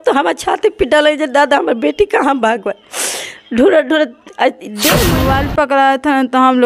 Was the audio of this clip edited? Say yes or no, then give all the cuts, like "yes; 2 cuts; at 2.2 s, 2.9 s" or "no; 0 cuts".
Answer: yes; 1 cut; at 5.0 s